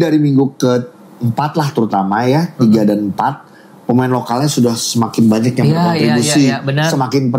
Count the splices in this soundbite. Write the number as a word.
zero